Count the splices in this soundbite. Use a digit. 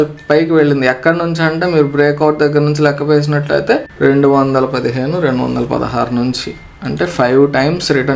0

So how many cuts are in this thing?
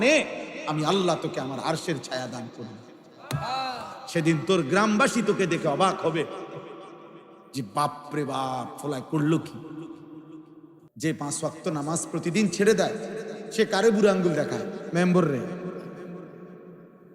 1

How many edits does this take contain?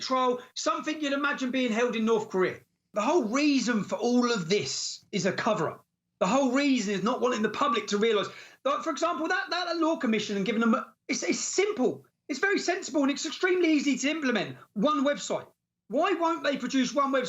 1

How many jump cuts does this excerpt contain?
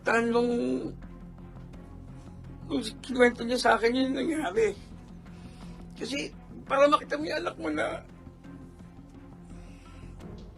2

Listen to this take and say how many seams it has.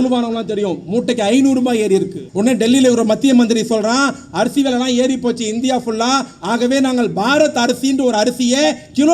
1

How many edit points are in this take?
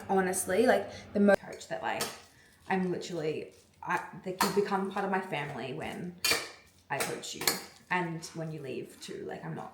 1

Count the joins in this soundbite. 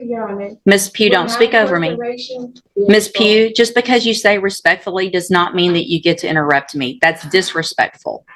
1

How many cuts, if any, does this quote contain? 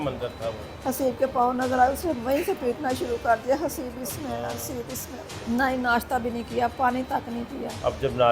1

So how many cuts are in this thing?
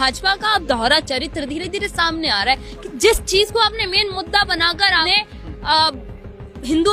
1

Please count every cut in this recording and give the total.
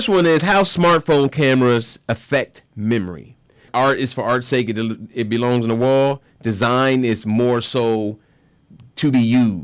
1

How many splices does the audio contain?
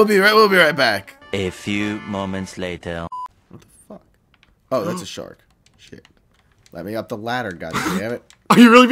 1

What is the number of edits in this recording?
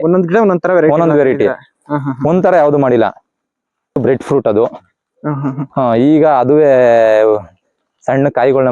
1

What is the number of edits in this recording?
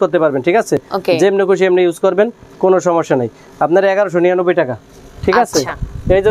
0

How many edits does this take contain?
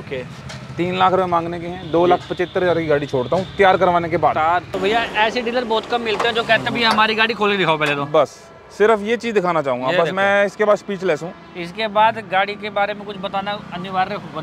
1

